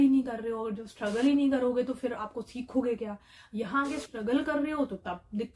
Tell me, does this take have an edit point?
no; 0 cuts

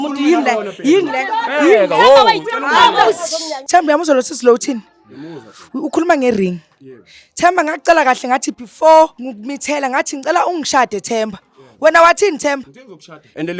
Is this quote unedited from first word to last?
no; 2 cuts; at 3.5 s, 9.3 s

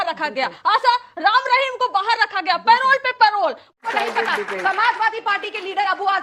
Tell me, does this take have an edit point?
yes; 1 cut; at 3.8 s

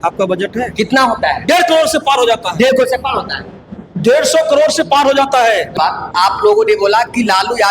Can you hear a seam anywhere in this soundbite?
yes; 1 cut; at 5.7 s

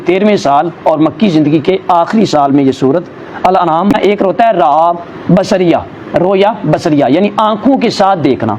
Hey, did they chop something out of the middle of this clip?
yes; 1 cut; at 3.9 s

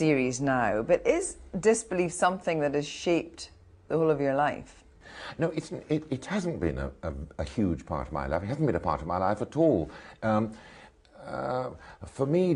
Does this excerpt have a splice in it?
yes; 1 cut; at 10.6 s

